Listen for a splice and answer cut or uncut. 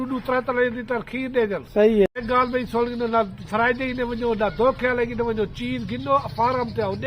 cut